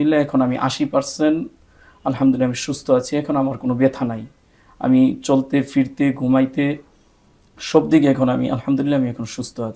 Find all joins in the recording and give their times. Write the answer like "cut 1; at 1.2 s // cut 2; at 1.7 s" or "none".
none